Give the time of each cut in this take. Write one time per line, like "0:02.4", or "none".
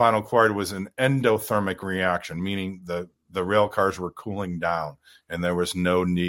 none

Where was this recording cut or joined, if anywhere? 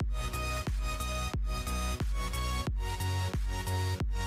none

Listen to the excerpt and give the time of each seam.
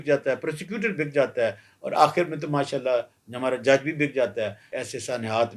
0:04.6

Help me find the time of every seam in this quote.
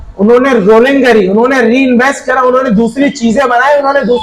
none

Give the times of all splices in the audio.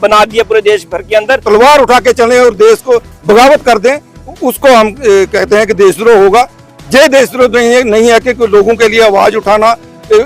0:01.4

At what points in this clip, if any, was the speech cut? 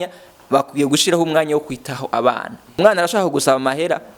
0:02.6

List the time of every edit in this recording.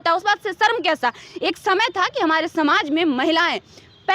none

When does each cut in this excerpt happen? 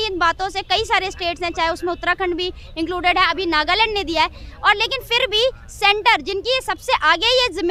none

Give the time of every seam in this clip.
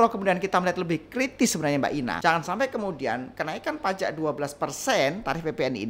0:02.2

